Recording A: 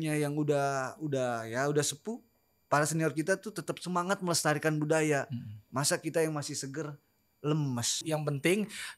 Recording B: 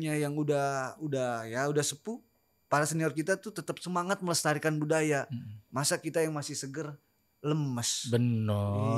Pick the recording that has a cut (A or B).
A